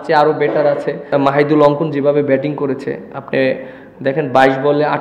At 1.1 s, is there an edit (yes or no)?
yes